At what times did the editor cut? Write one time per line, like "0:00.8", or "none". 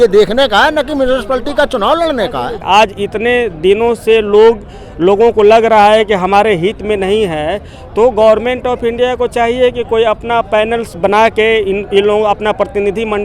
0:02.6